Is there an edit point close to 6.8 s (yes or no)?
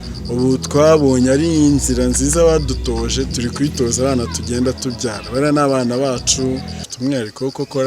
yes